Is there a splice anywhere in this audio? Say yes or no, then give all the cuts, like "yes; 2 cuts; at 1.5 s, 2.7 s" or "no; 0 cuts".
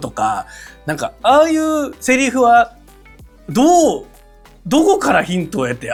no; 0 cuts